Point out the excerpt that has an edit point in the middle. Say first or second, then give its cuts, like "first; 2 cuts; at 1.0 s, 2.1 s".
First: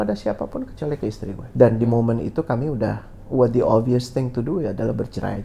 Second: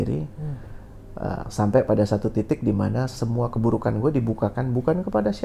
first; 1 cut; at 1.4 s